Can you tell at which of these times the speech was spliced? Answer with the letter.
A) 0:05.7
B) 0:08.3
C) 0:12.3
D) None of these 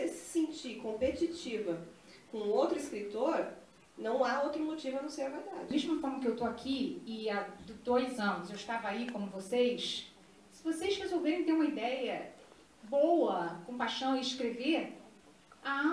A